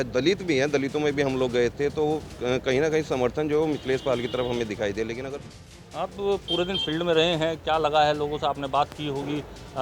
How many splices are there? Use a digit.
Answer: 1